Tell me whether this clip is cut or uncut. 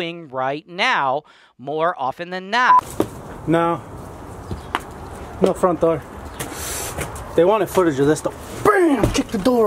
cut